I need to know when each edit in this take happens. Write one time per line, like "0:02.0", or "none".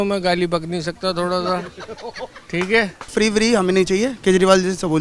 0:03.1